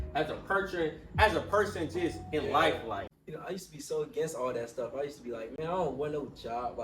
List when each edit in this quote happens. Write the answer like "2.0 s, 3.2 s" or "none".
3.1 s